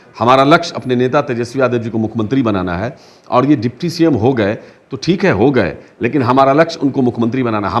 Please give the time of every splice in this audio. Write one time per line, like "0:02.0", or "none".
none